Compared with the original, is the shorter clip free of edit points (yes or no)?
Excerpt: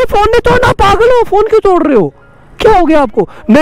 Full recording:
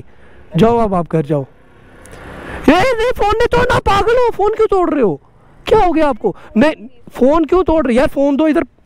yes